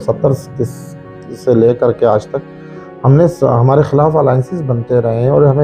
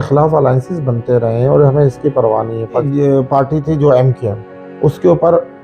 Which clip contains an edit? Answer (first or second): second